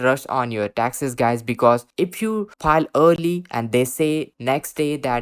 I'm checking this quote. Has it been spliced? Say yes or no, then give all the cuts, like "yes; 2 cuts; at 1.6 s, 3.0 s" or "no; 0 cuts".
no; 0 cuts